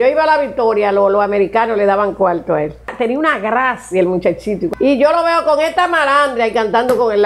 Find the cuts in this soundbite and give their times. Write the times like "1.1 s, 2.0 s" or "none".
2.9 s, 4.7 s